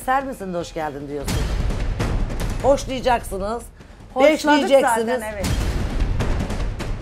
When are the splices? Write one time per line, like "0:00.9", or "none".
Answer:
none